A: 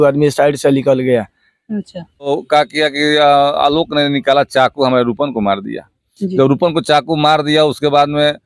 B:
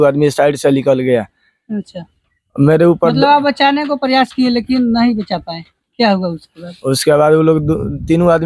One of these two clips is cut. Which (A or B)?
A